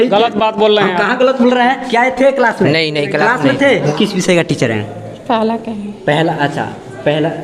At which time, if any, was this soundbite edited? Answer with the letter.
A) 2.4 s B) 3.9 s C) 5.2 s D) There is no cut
B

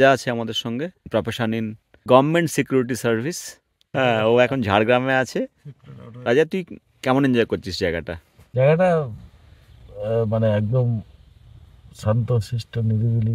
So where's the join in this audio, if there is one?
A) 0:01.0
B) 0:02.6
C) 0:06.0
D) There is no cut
A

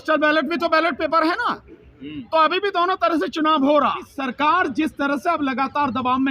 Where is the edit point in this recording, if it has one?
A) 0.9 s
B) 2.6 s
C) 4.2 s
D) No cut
C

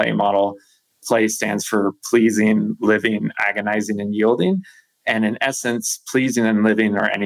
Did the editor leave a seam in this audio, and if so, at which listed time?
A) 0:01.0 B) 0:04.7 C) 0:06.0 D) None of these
A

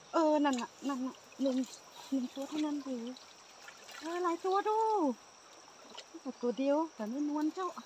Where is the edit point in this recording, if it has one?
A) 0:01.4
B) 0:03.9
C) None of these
C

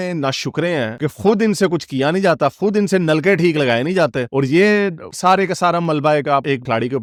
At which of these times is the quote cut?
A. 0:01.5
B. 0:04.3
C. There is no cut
C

